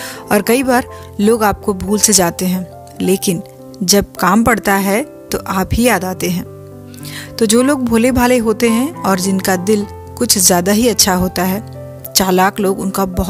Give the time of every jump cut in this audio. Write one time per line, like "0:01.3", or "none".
none